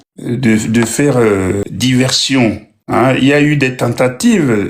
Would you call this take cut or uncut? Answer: cut